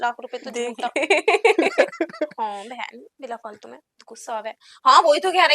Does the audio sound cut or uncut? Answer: uncut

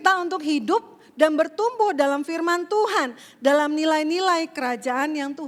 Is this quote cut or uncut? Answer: uncut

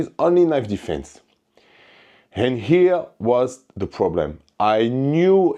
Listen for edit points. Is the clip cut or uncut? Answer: uncut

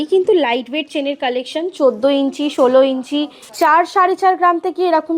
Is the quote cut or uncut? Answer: cut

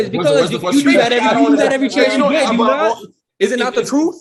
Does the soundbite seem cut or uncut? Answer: uncut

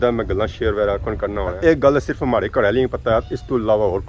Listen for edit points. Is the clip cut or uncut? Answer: cut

